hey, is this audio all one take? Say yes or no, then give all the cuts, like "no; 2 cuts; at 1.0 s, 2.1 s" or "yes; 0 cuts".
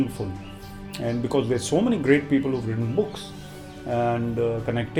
yes; 0 cuts